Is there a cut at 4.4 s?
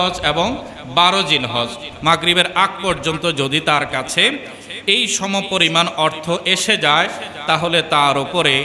no; 1 cut; at 1.9 s

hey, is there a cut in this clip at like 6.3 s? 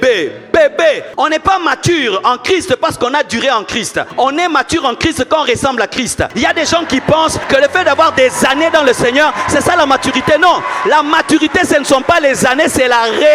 yes; 4 cuts; at 1.1 s, 4.0 s, 6.3 s, 7.4 s

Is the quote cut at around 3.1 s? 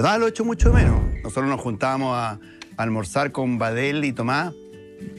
no; 0 cuts

